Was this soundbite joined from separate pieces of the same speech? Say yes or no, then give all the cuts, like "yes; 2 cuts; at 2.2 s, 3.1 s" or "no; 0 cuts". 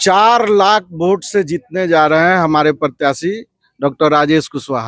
no; 0 cuts